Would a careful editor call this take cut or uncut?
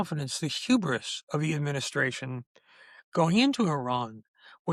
uncut